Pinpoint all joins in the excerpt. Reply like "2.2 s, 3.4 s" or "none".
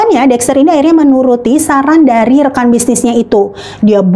none